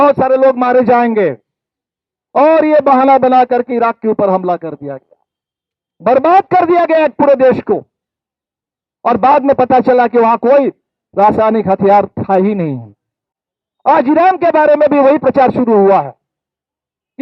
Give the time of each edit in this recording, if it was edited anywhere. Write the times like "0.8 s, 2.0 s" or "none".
none